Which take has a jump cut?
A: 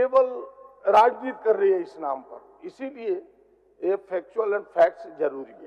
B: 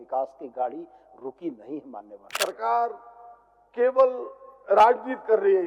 B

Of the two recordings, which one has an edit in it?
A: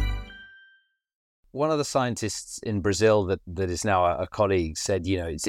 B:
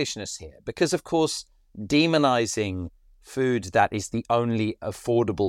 A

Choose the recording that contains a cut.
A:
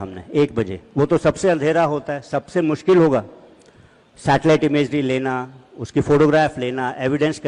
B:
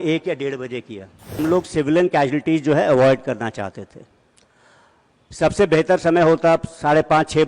B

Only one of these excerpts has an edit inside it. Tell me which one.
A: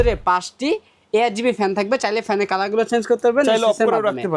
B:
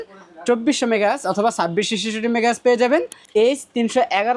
B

